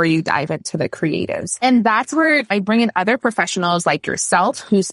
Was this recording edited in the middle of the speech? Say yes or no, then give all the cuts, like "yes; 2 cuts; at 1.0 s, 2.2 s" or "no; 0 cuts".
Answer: yes; 2 cuts; at 1.5 s, 2.5 s